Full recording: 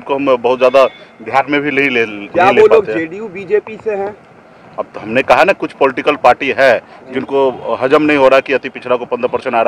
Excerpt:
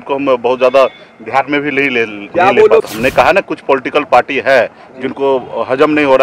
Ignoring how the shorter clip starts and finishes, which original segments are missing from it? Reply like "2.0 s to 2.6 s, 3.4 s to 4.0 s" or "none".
2.9 s to 5.0 s